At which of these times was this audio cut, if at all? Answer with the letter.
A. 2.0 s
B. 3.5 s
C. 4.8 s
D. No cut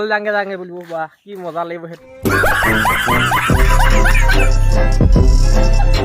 A